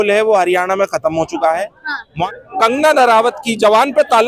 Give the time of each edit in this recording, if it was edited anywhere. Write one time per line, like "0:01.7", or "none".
0:02.0